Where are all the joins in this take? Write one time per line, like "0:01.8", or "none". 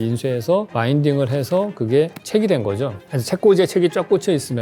0:03.0